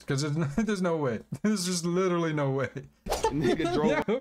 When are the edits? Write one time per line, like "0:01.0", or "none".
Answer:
0:03.1